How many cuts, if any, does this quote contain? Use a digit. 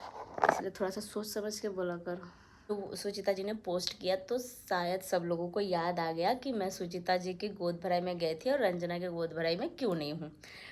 1